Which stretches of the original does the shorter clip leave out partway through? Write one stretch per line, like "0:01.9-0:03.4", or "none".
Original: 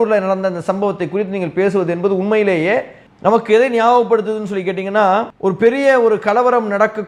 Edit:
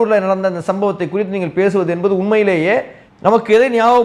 none